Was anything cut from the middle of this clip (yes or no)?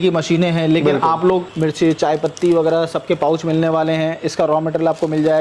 yes